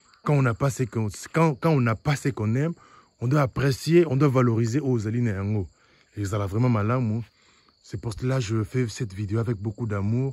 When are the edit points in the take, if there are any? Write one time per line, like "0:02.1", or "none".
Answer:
none